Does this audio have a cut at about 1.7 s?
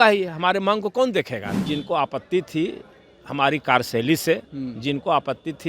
yes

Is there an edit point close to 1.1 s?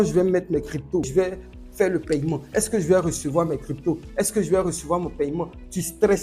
yes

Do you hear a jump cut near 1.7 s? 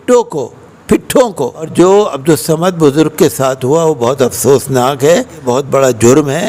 yes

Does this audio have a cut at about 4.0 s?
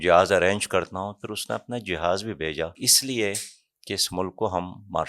no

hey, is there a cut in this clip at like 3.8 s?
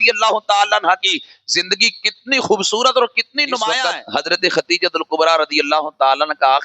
yes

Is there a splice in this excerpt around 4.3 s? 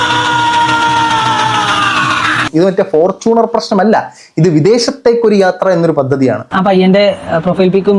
no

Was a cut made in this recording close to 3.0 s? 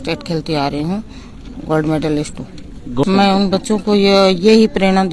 yes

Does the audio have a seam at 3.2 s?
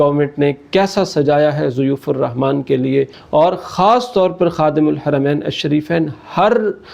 yes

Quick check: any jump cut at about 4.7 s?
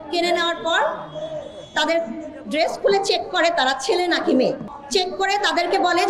yes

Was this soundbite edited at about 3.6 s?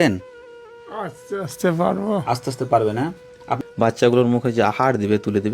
yes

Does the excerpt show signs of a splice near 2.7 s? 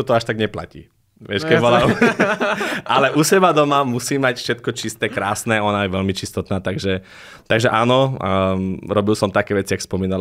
no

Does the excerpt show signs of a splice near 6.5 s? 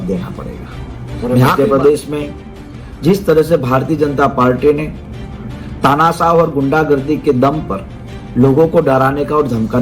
no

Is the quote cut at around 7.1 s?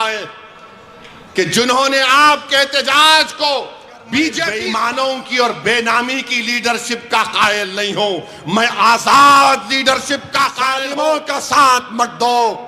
no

